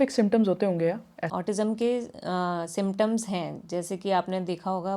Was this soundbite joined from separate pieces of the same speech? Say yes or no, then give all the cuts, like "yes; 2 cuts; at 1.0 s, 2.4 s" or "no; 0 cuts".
yes; 1 cut; at 1.3 s